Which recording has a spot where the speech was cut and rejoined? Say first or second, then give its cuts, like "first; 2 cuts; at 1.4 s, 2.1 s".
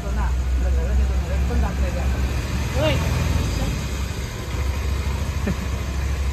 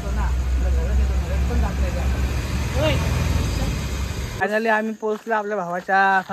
second; 1 cut; at 4.4 s